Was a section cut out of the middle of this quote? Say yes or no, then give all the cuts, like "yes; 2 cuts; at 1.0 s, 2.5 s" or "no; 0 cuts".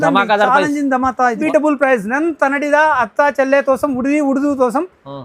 yes; 1 cut; at 1.4 s